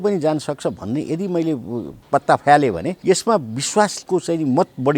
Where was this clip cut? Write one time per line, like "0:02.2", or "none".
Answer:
0:02.0
0:02.9
0:04.0